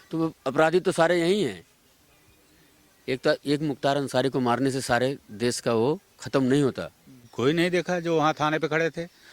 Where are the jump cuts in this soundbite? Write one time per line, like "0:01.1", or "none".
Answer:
0:07.2